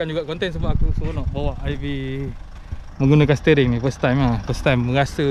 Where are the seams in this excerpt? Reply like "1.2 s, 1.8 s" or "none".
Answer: none

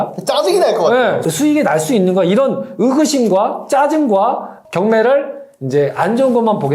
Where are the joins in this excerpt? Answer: 4.5 s

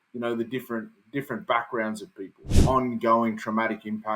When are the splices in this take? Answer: 2.5 s

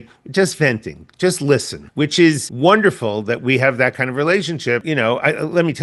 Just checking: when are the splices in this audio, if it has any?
1.8 s, 2.5 s, 4.8 s

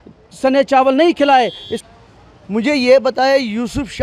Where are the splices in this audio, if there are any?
1.7 s

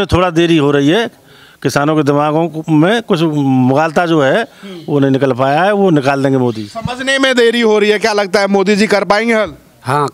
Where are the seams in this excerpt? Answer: none

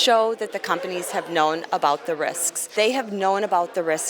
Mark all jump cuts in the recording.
2.6 s

